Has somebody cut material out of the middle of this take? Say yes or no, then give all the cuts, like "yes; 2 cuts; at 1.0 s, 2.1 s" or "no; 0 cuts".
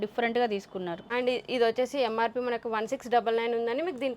yes; 1 cut; at 1.0 s